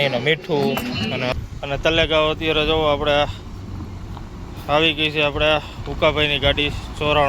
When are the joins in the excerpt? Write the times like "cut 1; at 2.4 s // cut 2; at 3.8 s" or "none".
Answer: cut 1; at 1.3 s